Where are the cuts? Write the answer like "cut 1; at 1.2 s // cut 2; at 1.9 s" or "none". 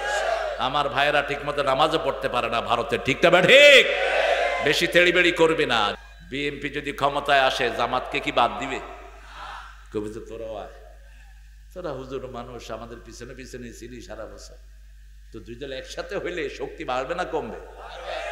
cut 1; at 5.9 s